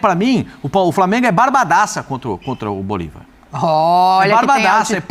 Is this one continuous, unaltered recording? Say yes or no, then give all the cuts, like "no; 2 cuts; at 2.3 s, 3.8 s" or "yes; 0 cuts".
yes; 0 cuts